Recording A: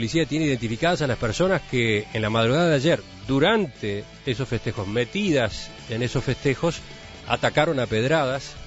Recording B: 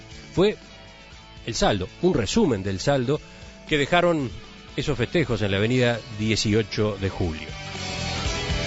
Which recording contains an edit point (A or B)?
A